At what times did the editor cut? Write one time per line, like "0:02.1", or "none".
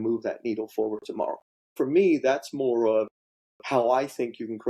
0:01.7